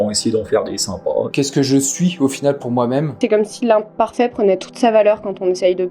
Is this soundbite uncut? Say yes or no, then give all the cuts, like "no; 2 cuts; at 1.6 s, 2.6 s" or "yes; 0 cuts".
no; 2 cuts; at 1.3 s, 3.2 s